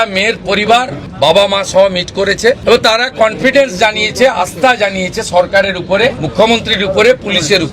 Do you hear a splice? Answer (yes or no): yes